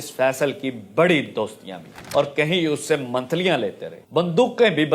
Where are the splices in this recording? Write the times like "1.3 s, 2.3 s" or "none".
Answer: 2.1 s, 4.0 s